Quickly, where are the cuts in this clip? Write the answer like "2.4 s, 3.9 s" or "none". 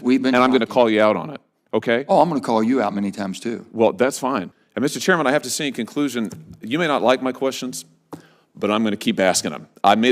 4.6 s